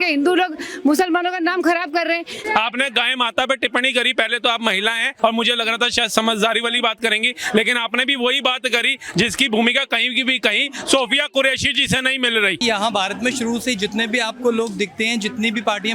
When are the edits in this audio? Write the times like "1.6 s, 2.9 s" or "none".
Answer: 2.4 s, 5.1 s, 12.6 s